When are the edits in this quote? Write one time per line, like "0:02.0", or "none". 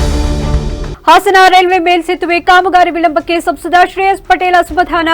none